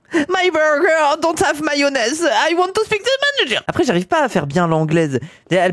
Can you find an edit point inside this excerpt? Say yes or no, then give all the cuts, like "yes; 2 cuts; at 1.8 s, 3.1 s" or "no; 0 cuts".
yes; 1 cut; at 3.6 s